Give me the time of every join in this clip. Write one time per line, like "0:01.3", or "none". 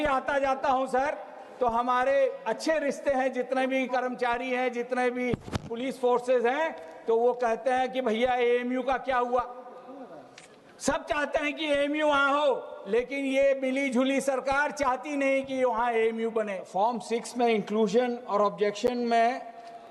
0:16.6